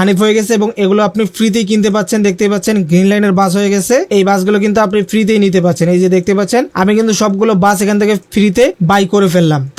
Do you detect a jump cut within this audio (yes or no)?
no